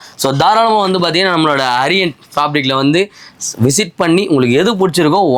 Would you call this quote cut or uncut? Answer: uncut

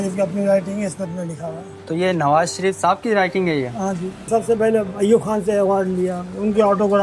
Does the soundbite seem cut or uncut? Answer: cut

